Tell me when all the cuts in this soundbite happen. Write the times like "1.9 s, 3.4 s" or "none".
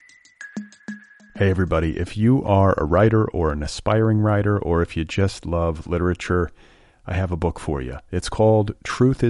0.9 s